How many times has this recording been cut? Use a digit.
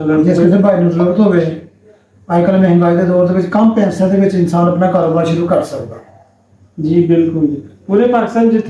0